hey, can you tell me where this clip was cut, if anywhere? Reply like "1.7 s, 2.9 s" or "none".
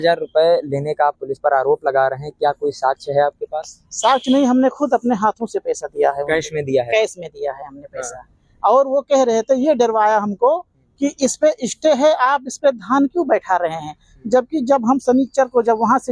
none

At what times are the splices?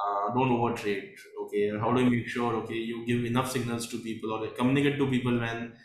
none

